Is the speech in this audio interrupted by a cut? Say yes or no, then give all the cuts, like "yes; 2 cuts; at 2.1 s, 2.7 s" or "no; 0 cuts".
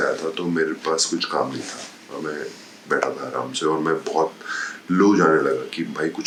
no; 0 cuts